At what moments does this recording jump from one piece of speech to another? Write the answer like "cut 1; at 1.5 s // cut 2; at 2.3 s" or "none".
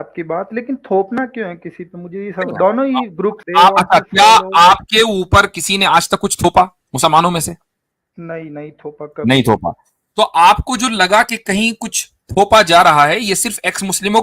cut 1; at 3.4 s